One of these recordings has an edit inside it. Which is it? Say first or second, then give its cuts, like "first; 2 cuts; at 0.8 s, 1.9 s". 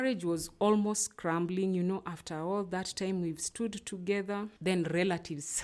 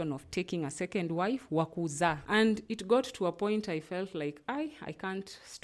second; 1 cut; at 2.2 s